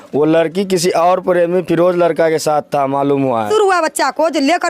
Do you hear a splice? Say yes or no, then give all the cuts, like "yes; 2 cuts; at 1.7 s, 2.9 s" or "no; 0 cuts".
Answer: yes; 1 cut; at 3.5 s